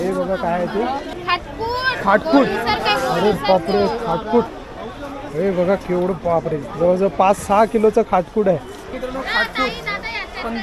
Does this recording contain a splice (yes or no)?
yes